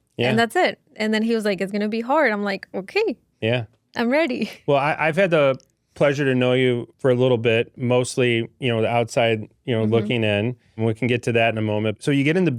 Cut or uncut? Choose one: uncut